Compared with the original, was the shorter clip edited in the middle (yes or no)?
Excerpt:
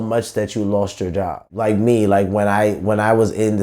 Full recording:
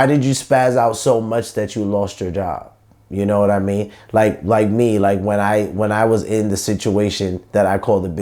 yes